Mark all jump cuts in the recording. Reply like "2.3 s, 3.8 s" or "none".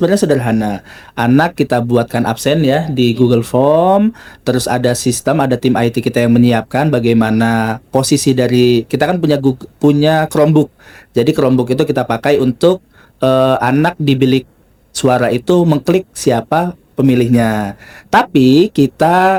none